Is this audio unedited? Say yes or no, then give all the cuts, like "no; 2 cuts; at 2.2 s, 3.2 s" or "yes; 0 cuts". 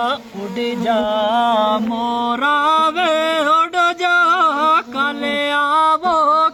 yes; 0 cuts